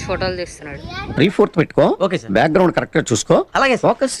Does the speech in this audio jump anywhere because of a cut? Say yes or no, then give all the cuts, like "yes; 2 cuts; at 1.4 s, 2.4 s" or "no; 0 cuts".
no; 0 cuts